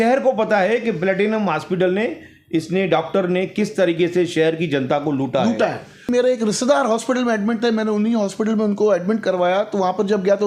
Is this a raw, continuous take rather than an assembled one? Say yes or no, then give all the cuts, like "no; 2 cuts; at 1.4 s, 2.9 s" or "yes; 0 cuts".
no; 1 cut; at 6.1 s